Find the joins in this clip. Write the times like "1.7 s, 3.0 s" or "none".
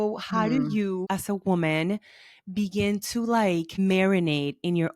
1.0 s, 3.8 s